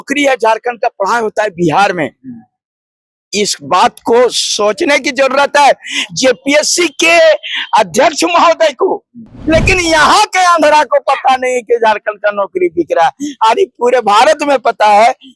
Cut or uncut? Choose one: cut